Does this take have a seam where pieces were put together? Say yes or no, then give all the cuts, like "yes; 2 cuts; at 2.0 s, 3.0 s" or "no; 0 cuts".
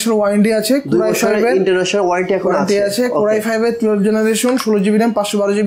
no; 0 cuts